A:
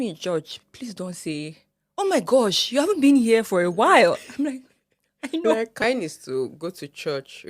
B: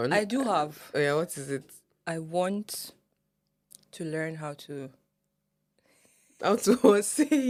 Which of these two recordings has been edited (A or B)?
A